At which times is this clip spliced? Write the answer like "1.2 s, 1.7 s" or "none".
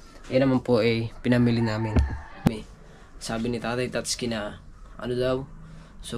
2.5 s

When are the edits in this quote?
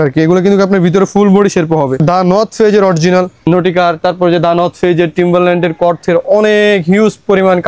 2.0 s, 3.5 s

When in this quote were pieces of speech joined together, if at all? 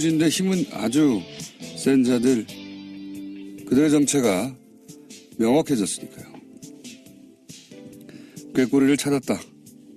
5.4 s

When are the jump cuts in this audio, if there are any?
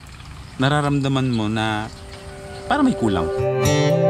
3.2 s

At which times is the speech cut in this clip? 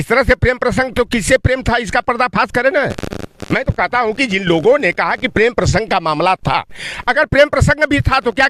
none

